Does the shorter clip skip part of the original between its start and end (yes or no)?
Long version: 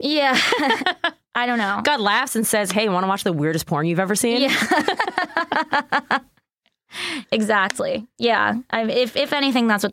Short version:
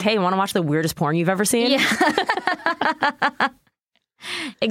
no